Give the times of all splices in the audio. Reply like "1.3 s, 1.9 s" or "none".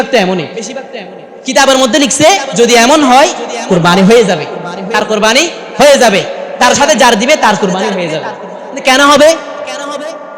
none